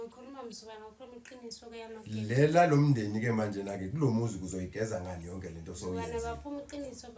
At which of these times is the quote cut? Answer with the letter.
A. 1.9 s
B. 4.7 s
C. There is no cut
C